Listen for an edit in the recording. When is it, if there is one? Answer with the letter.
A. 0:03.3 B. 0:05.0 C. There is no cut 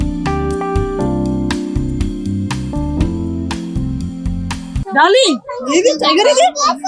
C